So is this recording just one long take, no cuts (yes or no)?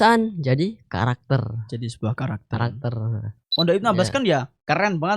no